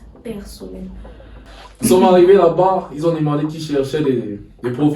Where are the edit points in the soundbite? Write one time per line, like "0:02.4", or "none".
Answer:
0:01.5